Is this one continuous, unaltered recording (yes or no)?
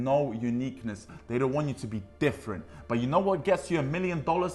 no